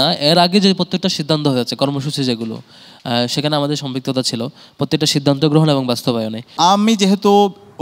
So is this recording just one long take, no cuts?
no; 1 cut; at 6.5 s

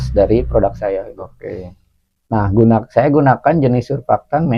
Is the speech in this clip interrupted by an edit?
no; 0 cuts

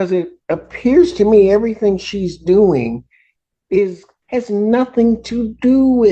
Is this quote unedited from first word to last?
no; 1 cut; at 4.1 s

